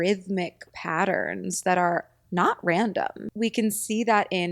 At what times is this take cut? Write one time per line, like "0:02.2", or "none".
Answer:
0:03.2